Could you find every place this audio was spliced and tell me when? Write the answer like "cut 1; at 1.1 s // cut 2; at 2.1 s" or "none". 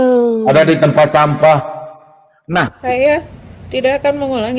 cut 1; at 2.8 s